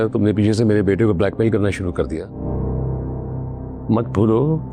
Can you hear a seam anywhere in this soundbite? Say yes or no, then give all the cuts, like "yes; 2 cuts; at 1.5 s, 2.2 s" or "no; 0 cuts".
yes; 1 cut; at 2.4 s